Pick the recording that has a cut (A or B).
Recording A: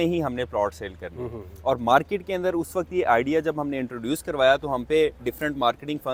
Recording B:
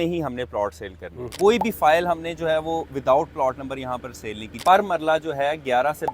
B